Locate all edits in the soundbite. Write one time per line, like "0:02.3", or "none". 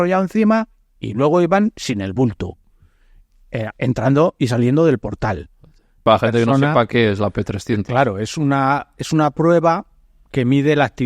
0:05.9